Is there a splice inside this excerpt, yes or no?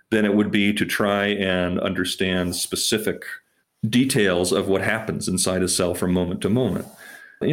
no